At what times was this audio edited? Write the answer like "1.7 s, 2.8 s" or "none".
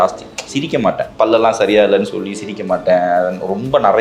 1.1 s